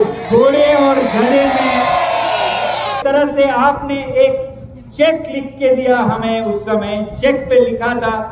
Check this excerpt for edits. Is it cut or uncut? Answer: cut